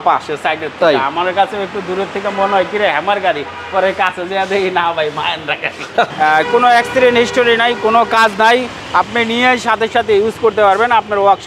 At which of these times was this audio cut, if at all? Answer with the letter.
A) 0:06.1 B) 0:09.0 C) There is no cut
A